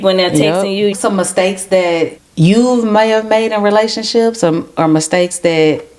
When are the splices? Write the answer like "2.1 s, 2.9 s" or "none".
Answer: 0.9 s, 2.2 s